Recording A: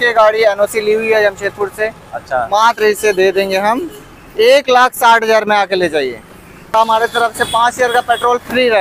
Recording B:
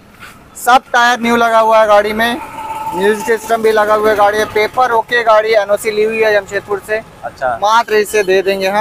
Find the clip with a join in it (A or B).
A